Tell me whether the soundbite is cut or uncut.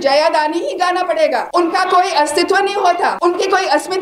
cut